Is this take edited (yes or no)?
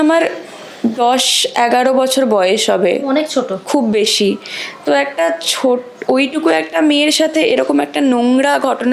no